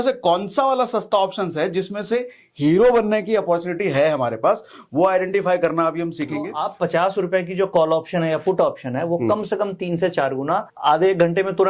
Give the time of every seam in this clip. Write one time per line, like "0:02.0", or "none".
0:06.6
0:10.7

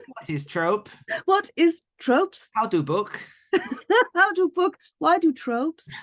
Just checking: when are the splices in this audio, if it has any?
none

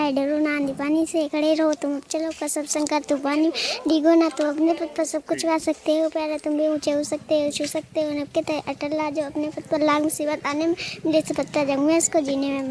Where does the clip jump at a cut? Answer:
none

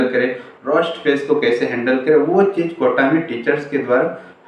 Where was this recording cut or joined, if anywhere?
none

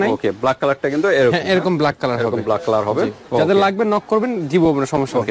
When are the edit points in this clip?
none

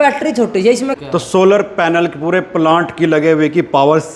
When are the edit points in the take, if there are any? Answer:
0:01.0

